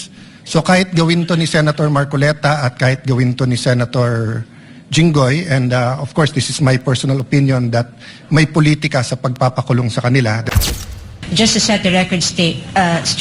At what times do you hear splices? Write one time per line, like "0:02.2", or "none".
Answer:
0:10.6